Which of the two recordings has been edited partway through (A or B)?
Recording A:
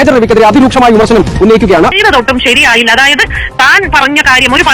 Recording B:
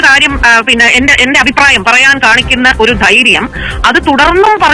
A